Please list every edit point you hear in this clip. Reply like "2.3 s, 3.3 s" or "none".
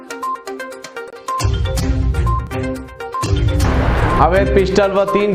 none